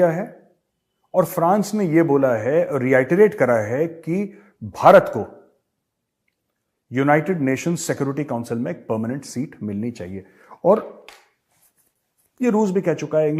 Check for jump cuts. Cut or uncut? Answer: uncut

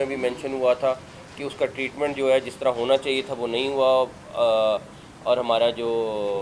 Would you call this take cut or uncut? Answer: uncut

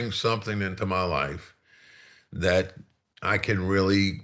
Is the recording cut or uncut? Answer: uncut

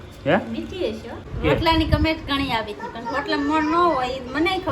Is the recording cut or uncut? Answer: cut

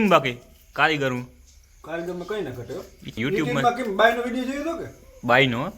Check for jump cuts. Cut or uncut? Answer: cut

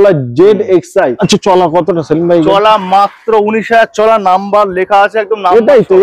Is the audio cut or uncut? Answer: cut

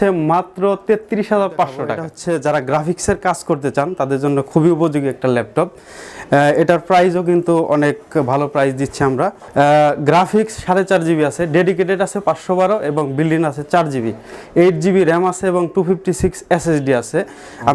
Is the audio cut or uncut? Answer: cut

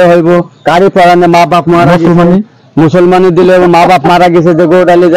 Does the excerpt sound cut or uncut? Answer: uncut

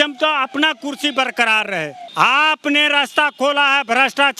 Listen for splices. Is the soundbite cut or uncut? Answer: cut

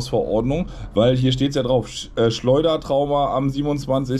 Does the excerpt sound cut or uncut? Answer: uncut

